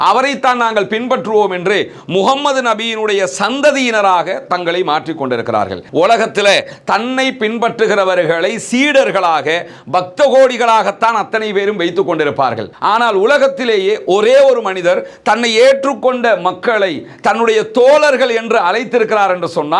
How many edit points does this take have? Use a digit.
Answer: 2